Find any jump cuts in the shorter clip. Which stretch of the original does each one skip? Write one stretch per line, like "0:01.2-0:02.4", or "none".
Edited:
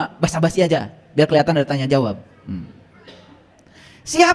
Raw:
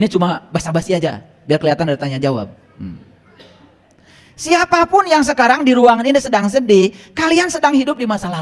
none